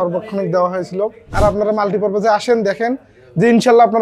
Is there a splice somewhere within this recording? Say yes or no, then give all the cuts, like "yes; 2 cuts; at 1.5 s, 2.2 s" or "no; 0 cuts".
yes; 1 cut; at 1.3 s